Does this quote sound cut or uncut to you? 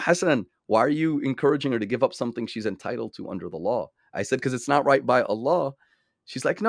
uncut